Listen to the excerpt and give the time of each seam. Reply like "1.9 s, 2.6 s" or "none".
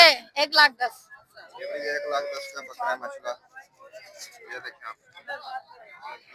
none